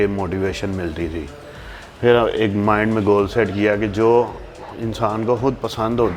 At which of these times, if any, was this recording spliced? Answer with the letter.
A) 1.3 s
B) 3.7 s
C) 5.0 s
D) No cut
D